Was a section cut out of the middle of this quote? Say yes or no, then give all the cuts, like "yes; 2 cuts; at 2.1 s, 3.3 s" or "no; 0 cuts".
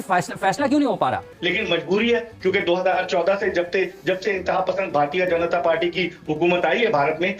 yes; 1 cut; at 1.3 s